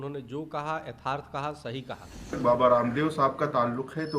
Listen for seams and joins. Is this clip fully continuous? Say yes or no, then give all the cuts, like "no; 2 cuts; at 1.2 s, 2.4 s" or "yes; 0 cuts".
no; 1 cut; at 2.4 s